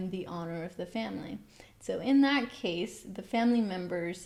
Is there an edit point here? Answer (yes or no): no